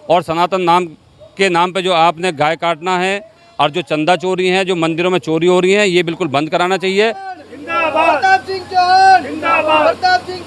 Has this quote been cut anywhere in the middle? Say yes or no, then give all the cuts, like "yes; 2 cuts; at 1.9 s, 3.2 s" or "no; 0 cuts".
yes; 1 cut; at 7.3 s